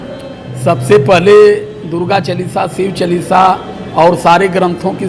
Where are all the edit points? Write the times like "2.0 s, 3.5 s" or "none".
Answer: none